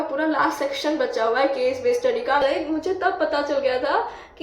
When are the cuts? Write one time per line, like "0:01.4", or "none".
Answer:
0:02.4